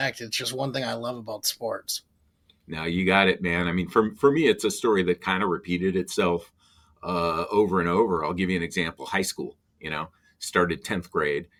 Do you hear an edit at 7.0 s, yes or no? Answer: no